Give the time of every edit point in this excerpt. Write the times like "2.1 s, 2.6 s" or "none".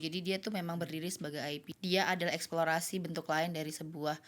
1.7 s